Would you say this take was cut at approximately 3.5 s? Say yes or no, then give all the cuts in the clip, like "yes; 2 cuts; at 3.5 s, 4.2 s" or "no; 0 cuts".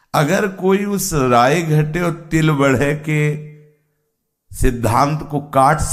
no; 0 cuts